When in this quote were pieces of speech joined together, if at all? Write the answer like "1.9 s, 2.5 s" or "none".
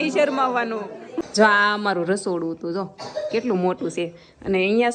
1.2 s